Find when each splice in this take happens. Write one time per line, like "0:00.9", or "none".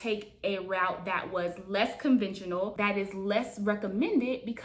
none